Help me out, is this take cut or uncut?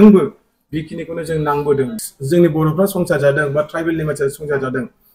cut